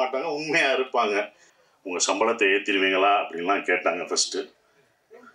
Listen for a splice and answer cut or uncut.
cut